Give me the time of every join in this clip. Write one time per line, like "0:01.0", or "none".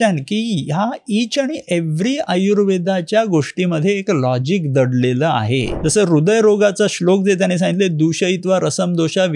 0:05.7